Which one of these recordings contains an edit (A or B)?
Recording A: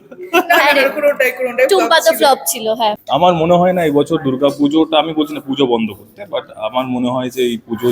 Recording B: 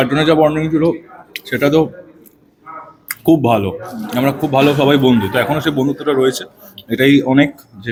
A